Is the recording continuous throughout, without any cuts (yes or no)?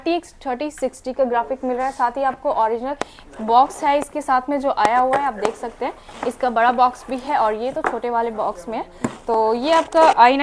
yes